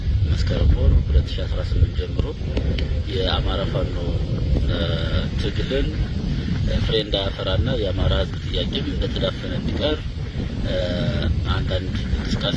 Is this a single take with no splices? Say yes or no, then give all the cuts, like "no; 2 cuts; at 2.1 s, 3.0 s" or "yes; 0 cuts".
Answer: yes; 0 cuts